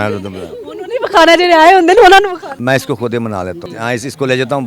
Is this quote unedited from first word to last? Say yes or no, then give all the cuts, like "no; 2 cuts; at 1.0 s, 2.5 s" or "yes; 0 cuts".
no; 2 cuts; at 2.5 s, 3.6 s